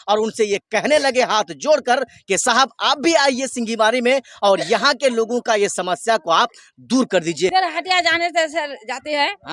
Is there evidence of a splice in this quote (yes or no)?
yes